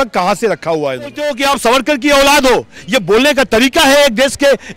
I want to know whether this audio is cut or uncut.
cut